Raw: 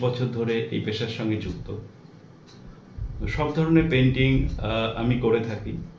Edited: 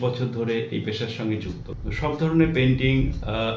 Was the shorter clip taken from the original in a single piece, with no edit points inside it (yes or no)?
no